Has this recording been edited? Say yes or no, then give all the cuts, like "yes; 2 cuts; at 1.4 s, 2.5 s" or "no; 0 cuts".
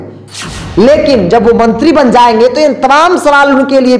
no; 0 cuts